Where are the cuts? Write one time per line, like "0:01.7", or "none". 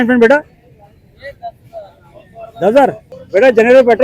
0:03.1